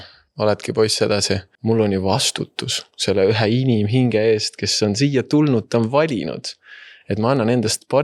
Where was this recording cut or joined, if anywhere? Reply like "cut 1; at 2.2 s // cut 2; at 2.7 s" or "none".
cut 1; at 1.5 s